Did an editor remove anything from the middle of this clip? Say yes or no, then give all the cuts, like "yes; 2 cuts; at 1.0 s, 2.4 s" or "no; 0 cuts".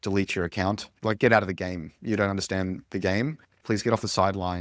yes; 2 cuts; at 0.9 s, 3.6 s